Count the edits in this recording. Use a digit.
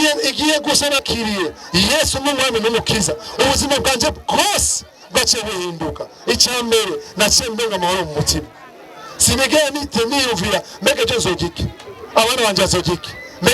1